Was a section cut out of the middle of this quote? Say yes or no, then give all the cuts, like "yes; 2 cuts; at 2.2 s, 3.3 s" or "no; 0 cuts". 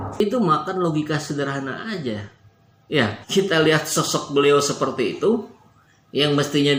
no; 0 cuts